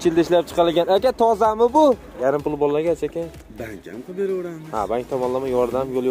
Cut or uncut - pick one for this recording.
cut